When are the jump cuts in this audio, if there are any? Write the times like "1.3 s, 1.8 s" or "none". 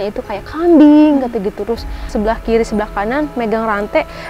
2.1 s